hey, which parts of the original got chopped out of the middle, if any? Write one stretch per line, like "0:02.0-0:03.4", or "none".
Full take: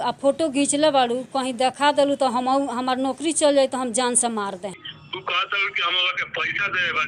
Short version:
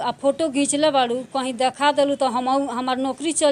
none